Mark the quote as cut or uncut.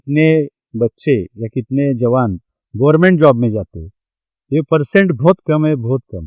uncut